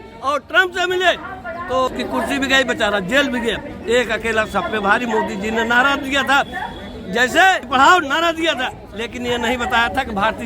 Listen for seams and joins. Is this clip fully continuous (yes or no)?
no